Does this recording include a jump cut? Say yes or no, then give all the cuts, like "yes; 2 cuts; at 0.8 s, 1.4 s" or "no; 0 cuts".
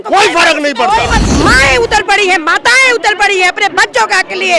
yes; 1 cut; at 1.2 s